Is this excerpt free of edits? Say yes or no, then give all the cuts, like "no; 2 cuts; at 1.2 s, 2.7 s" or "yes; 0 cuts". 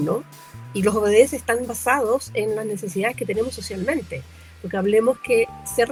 yes; 0 cuts